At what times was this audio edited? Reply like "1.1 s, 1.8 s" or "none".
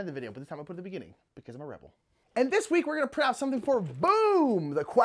2.1 s